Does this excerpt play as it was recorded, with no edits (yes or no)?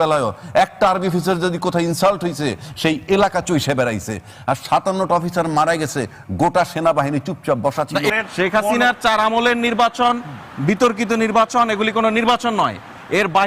no